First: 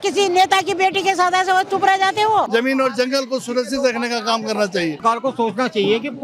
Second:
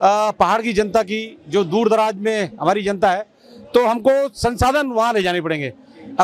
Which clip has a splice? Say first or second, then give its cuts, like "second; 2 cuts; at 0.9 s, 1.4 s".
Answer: first; 2 cuts; at 2.5 s, 5.0 s